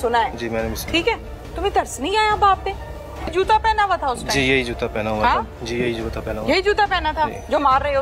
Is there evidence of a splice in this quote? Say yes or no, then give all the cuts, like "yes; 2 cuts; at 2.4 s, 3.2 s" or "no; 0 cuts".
yes; 1 cut; at 3.3 s